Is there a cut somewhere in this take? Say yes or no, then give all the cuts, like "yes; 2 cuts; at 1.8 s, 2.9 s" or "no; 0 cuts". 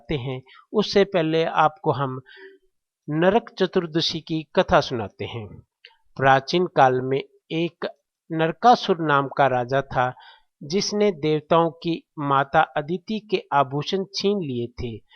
no; 0 cuts